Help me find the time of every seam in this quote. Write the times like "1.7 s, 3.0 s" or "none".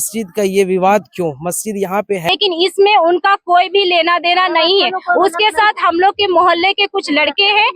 2.3 s